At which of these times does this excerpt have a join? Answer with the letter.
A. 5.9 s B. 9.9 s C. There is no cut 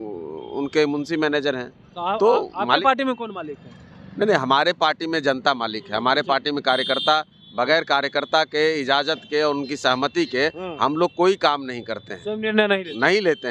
C